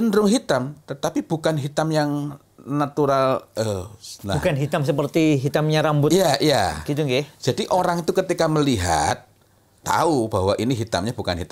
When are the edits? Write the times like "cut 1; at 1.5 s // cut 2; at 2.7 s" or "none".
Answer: none